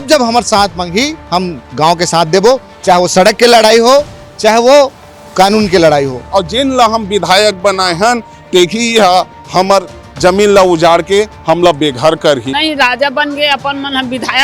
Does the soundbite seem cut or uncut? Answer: cut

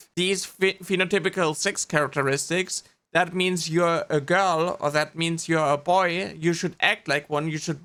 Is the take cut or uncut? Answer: uncut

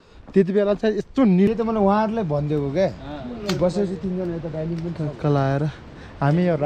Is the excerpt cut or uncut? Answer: cut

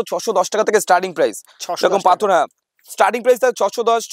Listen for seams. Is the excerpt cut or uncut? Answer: uncut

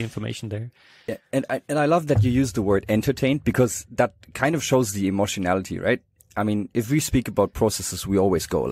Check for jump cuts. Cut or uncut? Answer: uncut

